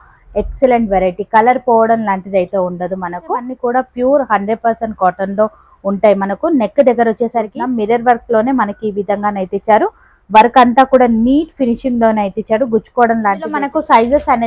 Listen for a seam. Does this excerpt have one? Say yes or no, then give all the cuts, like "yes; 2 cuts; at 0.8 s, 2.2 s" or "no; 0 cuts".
yes; 3 cuts; at 3.5 s, 7.6 s, 13.6 s